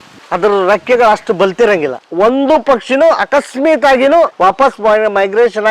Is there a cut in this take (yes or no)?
yes